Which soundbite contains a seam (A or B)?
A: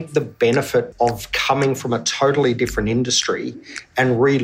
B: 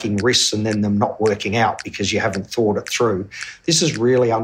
A